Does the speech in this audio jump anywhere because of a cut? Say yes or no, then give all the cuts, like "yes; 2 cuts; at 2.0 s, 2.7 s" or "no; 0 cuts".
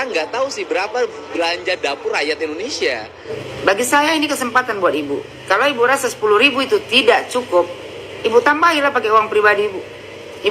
yes; 1 cut; at 3.3 s